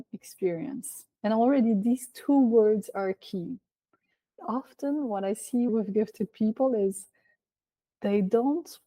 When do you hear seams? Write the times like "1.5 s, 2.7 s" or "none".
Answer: 4.3 s, 5.7 s